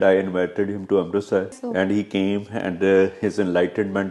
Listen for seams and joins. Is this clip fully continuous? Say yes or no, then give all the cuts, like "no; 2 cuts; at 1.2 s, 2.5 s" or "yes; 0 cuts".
no; 1 cut; at 1.6 s